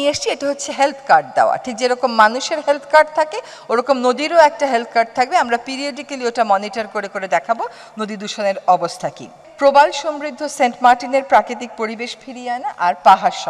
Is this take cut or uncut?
cut